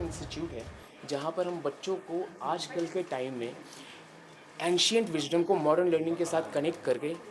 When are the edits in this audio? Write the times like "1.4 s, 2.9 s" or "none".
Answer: none